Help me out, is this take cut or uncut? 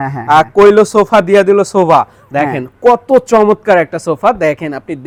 uncut